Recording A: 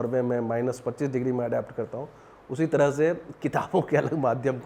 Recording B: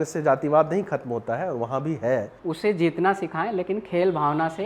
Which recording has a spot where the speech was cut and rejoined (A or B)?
B